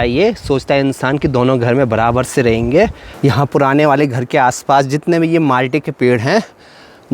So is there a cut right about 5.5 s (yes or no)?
no